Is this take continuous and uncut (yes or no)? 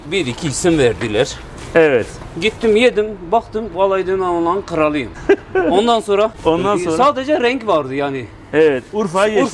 yes